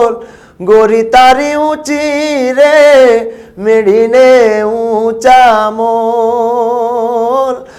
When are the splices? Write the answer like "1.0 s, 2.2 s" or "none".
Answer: none